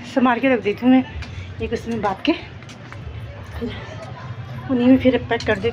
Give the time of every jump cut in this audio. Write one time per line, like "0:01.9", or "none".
none